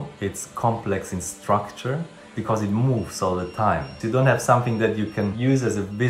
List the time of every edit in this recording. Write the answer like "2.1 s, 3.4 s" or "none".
2.3 s, 4.0 s